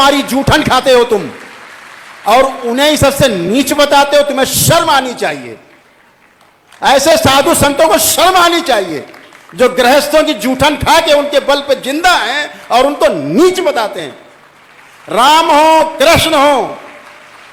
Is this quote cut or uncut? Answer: uncut